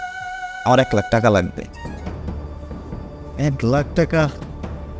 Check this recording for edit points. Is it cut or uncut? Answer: uncut